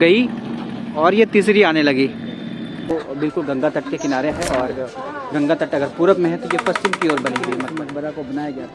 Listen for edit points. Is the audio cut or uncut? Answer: cut